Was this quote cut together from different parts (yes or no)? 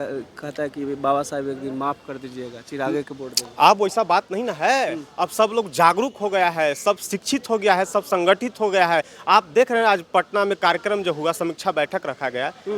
no